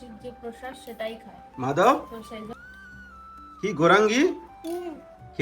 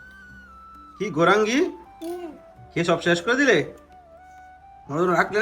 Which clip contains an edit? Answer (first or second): first